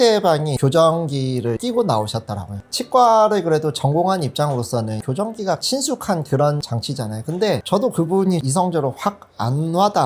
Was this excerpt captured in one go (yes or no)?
yes